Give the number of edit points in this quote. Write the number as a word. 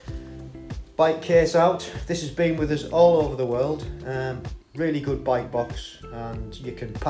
one